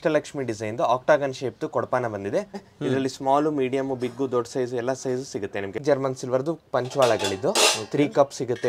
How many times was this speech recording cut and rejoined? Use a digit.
2